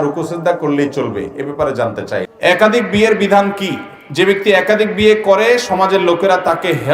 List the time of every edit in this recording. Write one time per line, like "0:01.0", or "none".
0:02.2